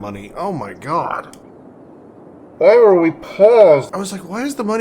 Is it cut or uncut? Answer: cut